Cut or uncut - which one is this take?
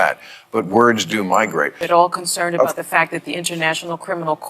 cut